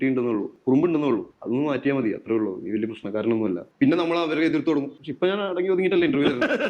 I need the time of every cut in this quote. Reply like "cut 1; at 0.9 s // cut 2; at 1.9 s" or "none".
cut 1; at 3.7 s

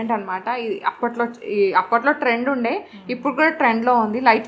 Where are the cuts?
none

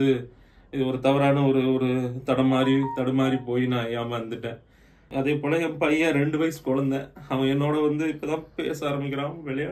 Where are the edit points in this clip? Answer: cut 1; at 5.0 s

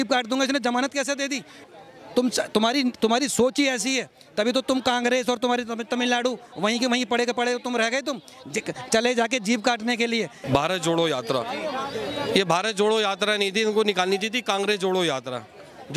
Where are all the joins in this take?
cut 1; at 1.6 s // cut 2; at 10.4 s

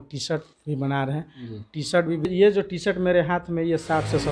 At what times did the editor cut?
cut 1; at 2.3 s

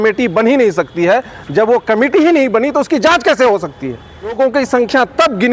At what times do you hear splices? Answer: cut 1; at 4.3 s

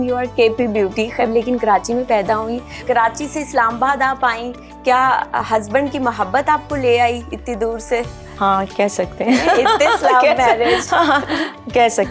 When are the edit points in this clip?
cut 1; at 1.2 s // cut 2; at 2.8 s

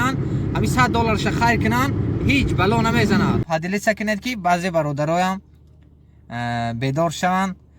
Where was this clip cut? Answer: cut 1; at 3.4 s

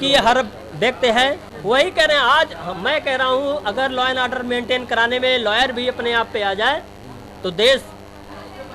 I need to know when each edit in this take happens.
none

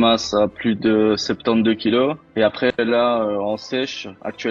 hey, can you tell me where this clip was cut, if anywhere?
none

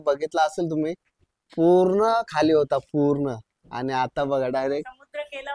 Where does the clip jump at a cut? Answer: none

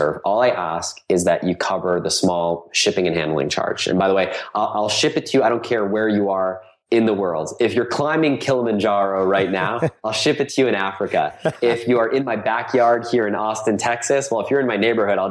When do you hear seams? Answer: none

